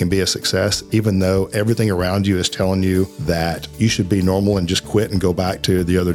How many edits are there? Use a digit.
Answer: 1